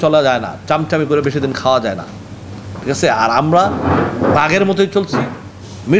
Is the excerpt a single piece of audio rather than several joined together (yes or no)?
yes